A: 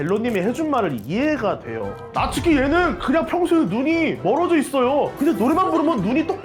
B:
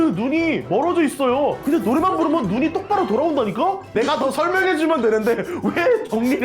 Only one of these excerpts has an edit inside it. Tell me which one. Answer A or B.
B